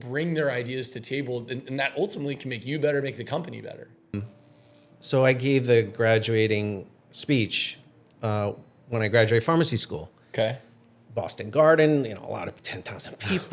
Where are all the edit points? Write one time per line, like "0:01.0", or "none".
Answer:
0:04.2